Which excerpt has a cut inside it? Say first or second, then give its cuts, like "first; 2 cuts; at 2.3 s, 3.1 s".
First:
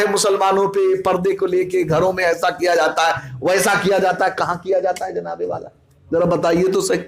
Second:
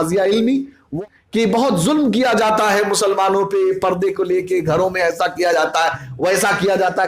second; 1 cut; at 0.9 s